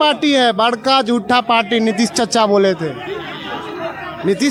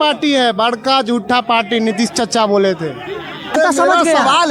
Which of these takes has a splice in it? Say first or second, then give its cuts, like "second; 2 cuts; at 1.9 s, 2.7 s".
second; 1 cut; at 3.6 s